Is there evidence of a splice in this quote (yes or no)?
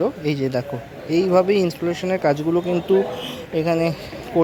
no